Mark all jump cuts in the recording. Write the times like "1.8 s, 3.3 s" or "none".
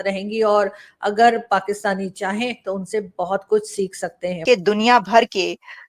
4.3 s